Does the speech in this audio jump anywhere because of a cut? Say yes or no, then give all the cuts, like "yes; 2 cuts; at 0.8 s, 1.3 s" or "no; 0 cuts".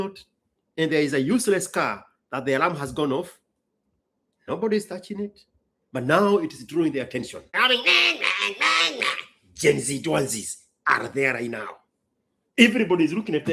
yes; 1 cut; at 7.6 s